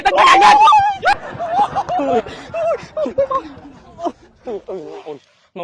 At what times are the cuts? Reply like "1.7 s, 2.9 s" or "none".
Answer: 1.1 s

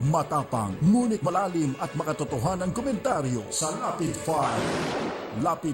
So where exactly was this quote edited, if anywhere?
1.3 s

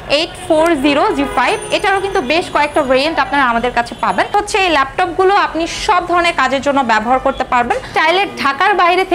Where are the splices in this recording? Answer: 4.3 s, 7.9 s

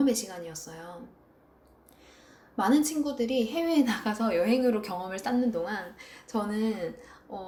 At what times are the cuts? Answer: none

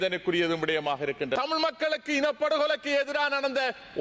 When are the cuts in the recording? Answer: 1.4 s

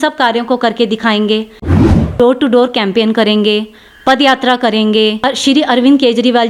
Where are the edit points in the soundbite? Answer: 1.8 s, 5.2 s

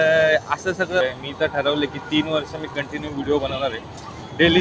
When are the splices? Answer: 1.0 s

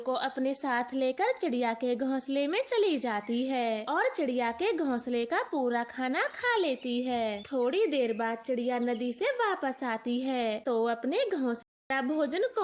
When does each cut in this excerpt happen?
11.7 s

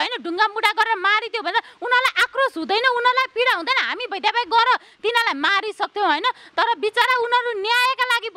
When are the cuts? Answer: none

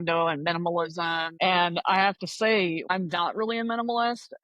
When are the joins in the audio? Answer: 1.3 s, 2.9 s

